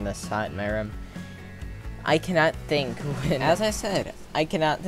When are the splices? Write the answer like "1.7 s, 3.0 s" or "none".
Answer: 3.4 s

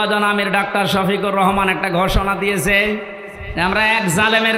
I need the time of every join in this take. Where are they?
none

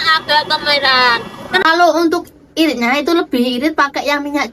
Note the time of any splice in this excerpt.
1.6 s

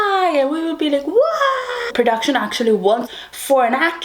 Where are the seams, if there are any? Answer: 1.8 s, 3.1 s

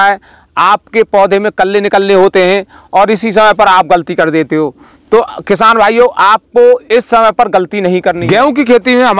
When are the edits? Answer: 8.2 s

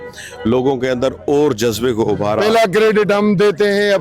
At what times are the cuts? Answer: 2.4 s

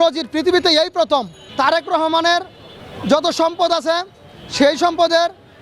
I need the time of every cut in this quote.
1.4 s

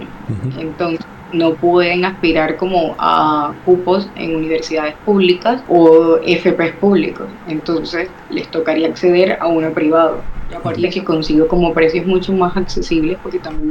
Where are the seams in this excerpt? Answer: 5.6 s, 10.8 s

